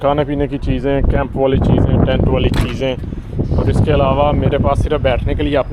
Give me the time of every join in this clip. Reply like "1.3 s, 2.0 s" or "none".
none